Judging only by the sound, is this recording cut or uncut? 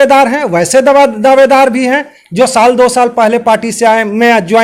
uncut